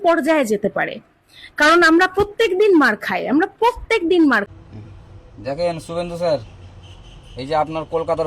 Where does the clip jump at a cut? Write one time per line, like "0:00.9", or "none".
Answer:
0:04.5